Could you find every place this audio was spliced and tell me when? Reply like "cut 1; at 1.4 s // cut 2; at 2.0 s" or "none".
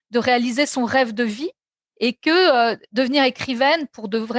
none